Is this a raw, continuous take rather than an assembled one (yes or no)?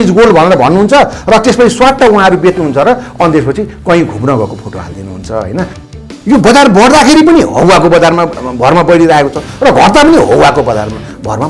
no